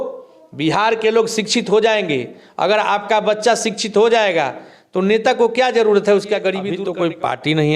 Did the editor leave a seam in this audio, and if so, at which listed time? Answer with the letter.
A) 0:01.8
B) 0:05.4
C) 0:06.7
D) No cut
C